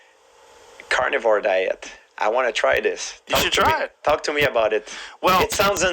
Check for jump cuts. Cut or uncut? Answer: cut